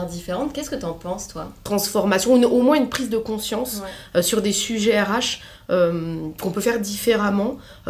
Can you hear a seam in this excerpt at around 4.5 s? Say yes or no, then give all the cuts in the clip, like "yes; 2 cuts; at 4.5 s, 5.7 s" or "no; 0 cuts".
no; 1 cut; at 1.6 s